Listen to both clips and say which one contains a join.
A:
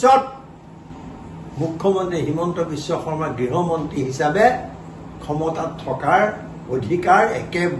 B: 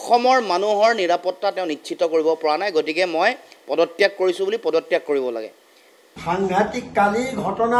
B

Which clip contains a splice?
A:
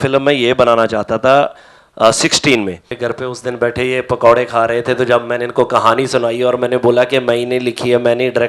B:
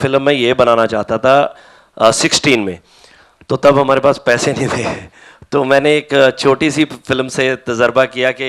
A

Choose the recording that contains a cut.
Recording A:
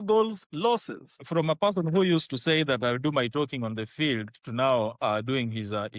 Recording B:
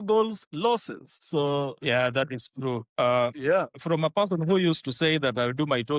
A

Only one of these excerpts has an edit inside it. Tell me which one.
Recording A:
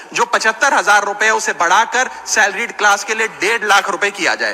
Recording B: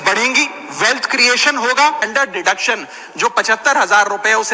B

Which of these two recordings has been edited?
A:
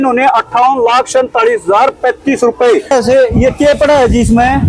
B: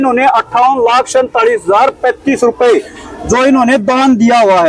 A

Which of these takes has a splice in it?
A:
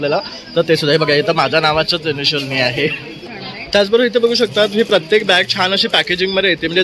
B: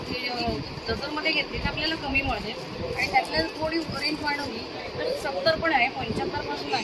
A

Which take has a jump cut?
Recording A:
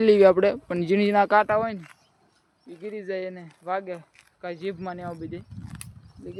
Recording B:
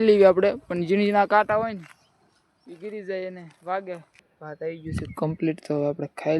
B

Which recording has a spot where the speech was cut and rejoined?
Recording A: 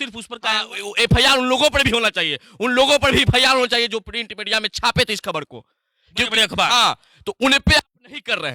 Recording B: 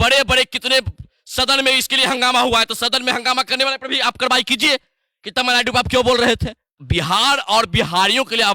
B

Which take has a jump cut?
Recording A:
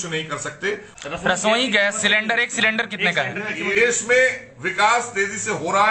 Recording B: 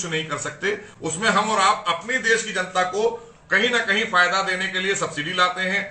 A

